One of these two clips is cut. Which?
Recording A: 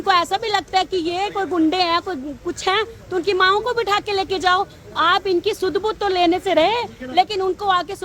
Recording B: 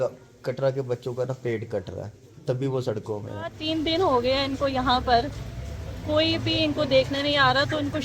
B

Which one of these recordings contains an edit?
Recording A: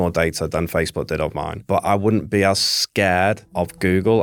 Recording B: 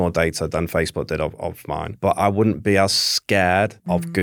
A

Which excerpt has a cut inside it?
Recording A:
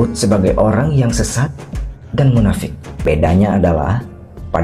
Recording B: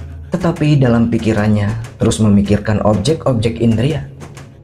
A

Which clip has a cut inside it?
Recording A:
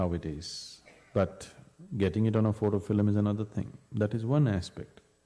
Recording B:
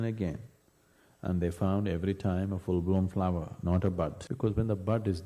B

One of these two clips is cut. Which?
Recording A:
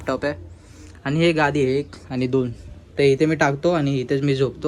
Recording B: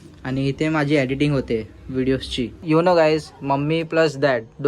B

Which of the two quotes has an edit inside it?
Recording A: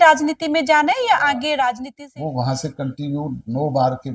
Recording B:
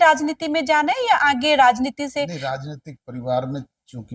A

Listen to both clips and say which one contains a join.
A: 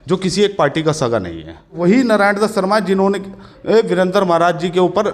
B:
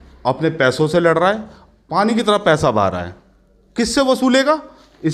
A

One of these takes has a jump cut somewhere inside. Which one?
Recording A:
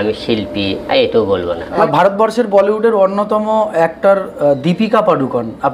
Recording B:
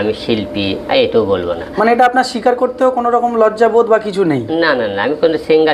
A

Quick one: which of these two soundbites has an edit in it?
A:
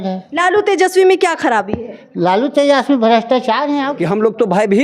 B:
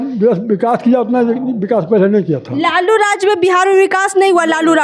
A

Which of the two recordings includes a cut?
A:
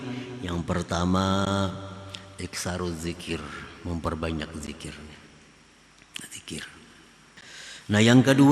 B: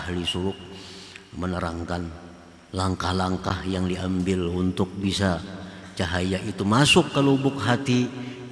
A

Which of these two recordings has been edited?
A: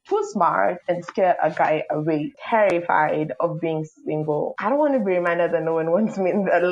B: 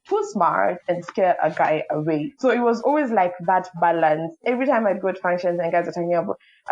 A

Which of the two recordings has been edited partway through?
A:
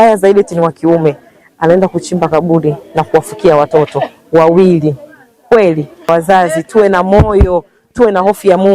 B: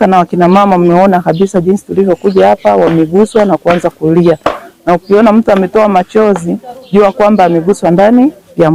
A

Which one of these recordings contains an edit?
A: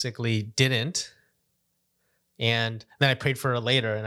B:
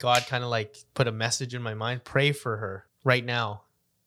B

